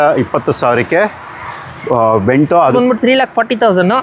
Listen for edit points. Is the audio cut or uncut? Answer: cut